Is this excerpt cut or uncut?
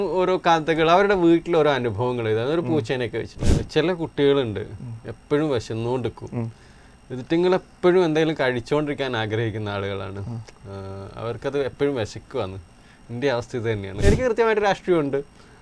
cut